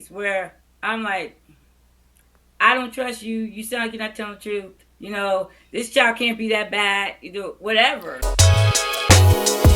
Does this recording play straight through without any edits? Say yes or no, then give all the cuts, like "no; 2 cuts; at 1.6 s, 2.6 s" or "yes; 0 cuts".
no; 1 cut; at 8.1 s